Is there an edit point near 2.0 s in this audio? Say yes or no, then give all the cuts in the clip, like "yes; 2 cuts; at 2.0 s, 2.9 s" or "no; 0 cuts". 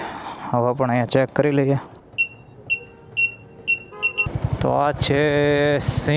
yes; 2 cuts; at 2.0 s, 4.3 s